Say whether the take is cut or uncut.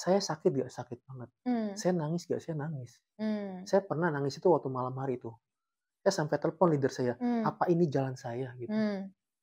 uncut